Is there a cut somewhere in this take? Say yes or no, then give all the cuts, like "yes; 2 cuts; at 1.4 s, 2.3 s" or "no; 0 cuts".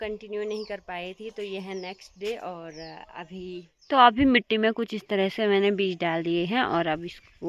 yes; 1 cut; at 3.7 s